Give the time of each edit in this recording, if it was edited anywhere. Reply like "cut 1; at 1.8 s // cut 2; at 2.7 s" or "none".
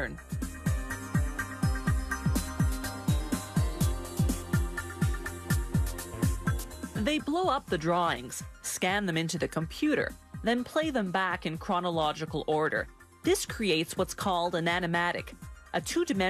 none